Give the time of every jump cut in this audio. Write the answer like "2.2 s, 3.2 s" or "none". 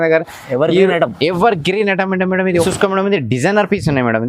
2.5 s